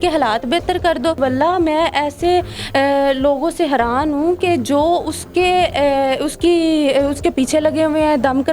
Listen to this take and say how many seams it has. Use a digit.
1